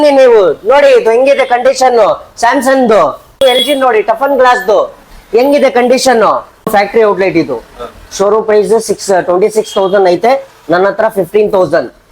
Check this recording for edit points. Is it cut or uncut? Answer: cut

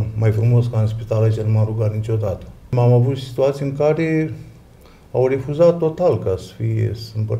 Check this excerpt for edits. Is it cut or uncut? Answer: cut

